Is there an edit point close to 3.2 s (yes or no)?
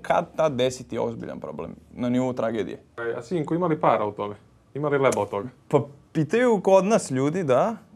yes